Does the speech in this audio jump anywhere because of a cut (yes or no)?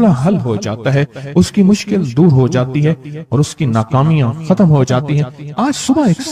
no